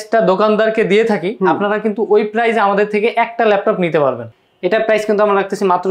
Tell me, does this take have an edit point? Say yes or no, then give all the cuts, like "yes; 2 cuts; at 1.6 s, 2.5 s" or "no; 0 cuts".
yes; 1 cut; at 4.3 s